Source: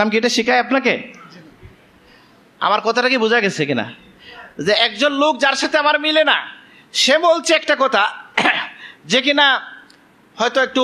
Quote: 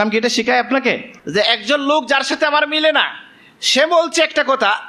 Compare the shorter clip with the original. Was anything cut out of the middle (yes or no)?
yes